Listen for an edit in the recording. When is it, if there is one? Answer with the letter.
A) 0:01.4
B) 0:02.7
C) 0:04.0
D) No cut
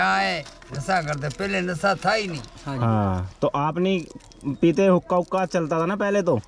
D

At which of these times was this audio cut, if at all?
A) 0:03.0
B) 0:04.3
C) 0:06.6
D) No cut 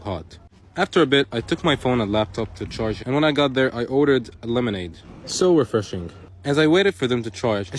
A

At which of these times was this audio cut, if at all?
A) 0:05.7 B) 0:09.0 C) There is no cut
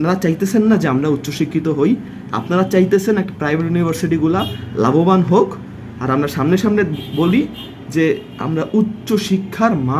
C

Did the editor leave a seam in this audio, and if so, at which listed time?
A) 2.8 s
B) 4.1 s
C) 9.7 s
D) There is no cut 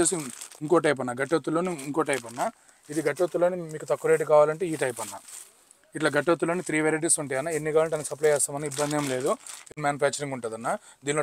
C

